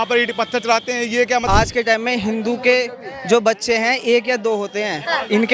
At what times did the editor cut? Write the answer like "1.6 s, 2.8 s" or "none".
1.4 s